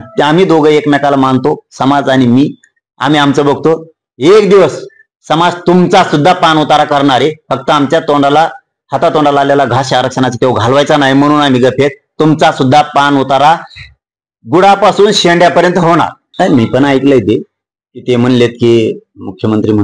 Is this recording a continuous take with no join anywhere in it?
no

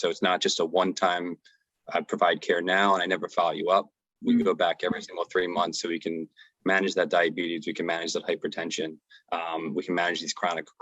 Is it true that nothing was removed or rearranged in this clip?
yes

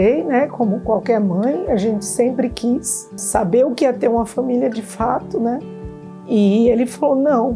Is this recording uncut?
no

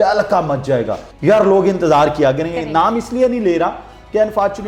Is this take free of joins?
no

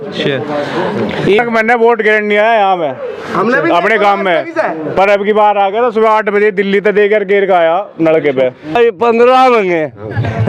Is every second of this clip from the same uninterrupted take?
no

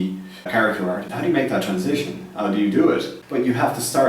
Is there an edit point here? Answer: yes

